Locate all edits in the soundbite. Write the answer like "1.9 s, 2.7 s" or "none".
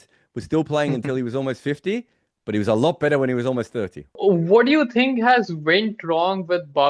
4.2 s

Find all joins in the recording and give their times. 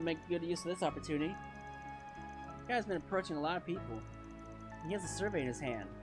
none

